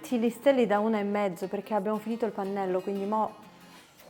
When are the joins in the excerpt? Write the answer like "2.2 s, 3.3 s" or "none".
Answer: none